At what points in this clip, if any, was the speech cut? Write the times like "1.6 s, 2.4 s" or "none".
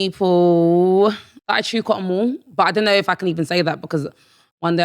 1.3 s